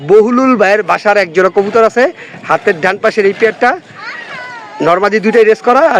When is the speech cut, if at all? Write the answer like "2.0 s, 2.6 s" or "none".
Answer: none